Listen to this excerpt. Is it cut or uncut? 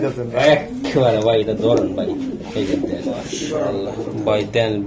cut